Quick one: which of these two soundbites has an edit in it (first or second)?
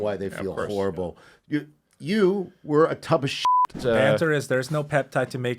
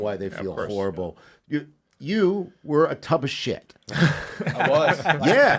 first